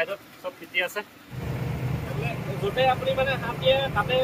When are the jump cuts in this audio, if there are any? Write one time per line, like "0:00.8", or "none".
0:01.4